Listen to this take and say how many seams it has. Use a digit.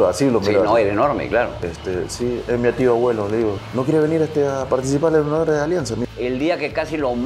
2